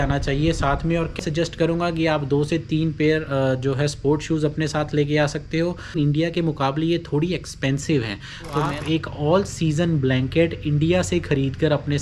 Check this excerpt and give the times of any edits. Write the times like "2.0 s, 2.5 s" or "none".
1.2 s, 6.0 s, 8.7 s